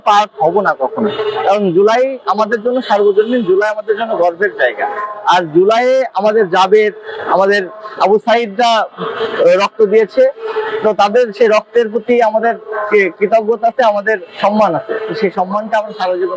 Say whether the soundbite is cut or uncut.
uncut